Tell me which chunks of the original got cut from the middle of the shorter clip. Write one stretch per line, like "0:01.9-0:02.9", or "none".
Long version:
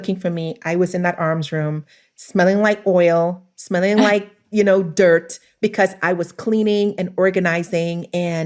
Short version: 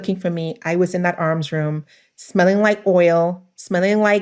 none